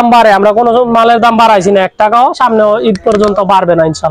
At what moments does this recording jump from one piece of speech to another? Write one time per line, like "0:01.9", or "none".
none